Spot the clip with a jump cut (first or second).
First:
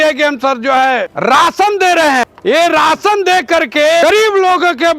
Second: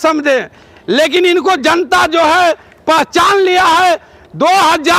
first